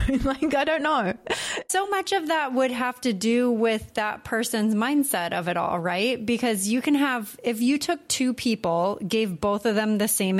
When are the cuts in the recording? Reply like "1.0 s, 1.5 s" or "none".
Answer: none

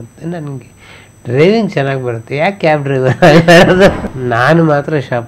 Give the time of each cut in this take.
4.0 s

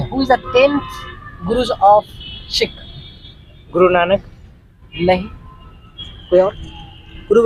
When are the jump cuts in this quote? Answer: none

